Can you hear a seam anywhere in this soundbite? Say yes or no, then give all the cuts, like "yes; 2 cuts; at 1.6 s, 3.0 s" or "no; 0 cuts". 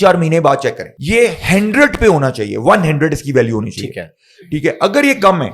yes; 1 cut; at 0.9 s